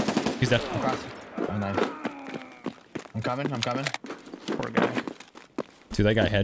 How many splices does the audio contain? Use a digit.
0